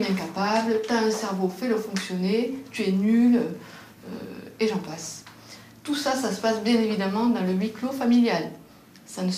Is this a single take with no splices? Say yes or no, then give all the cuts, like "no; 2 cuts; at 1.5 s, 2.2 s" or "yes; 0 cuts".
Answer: yes; 0 cuts